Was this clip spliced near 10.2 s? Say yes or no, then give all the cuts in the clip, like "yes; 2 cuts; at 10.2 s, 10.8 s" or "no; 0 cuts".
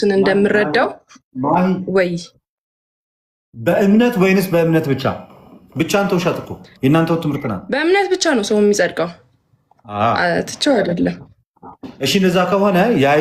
no; 1 cut; at 7.5 s